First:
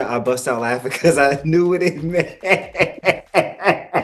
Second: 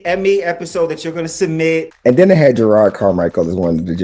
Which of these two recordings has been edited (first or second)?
second